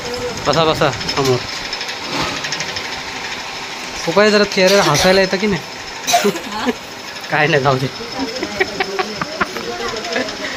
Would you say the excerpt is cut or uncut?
uncut